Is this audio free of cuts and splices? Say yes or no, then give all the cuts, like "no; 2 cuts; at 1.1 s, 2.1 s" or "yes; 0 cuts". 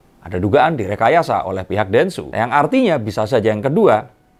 yes; 0 cuts